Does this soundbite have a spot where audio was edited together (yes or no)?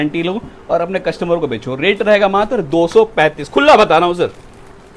no